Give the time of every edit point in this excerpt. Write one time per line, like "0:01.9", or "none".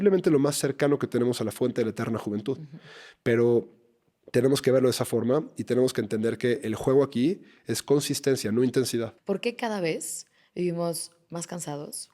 0:09.1